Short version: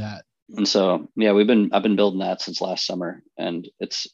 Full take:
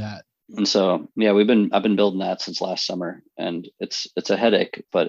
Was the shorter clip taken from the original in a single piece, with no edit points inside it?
yes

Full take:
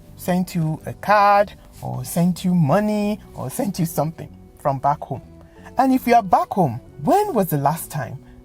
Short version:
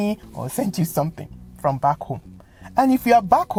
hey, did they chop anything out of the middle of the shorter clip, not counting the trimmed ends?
no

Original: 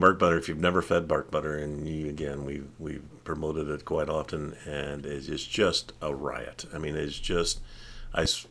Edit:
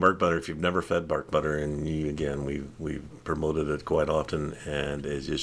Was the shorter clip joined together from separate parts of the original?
no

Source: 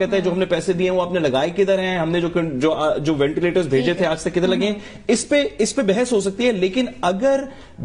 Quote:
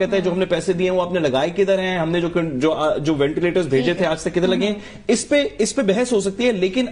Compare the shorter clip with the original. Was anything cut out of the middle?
no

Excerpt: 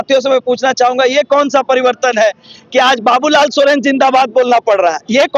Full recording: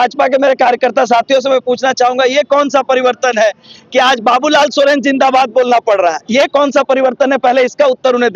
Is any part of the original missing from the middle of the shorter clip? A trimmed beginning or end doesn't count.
no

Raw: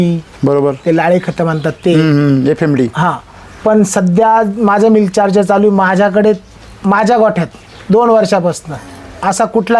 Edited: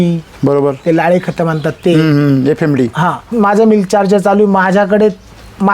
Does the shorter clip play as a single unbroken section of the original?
no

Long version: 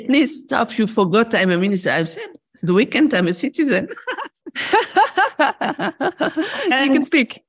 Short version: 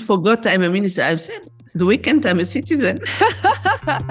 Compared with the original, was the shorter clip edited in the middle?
yes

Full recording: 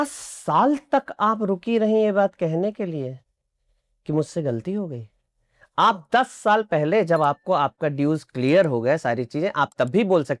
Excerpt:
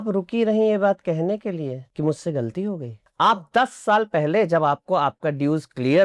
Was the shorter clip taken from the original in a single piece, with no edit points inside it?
no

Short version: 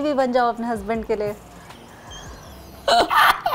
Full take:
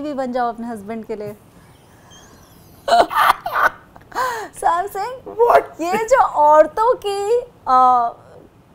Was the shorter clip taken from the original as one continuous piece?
yes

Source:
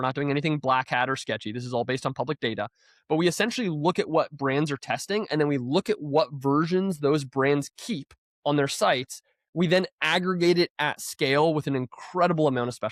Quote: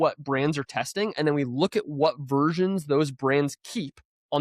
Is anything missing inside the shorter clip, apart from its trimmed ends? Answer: no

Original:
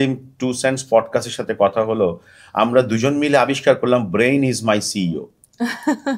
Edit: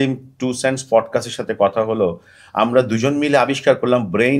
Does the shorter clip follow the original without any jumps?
yes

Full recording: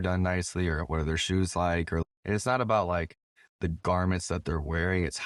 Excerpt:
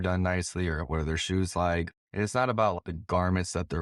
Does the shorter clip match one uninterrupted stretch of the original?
no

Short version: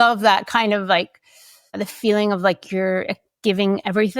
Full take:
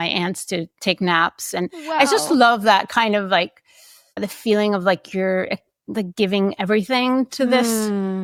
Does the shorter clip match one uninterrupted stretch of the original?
no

